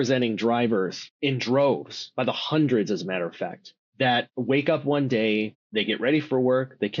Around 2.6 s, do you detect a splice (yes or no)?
no